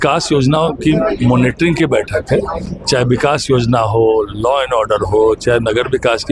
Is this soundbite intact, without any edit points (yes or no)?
yes